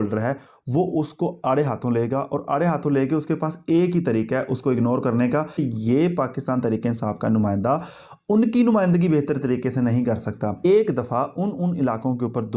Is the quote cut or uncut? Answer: cut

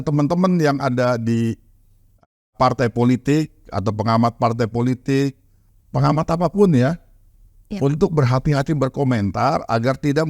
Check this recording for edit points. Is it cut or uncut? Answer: cut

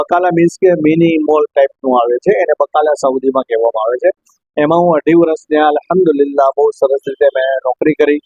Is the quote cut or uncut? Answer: uncut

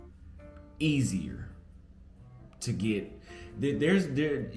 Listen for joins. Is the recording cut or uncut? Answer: cut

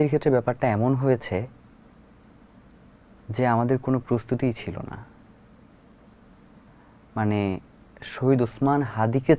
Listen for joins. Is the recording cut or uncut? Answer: uncut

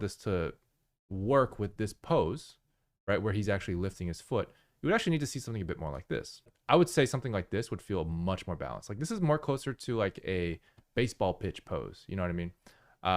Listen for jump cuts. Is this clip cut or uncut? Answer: cut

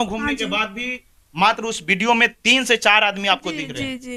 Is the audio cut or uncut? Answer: uncut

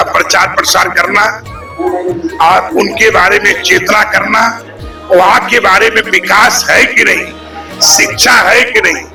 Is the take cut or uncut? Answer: uncut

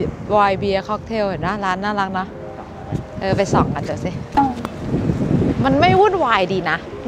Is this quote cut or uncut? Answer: uncut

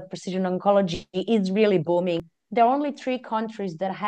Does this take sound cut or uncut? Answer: cut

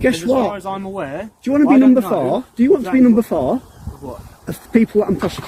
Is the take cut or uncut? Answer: uncut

